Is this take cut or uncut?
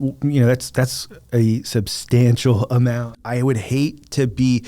cut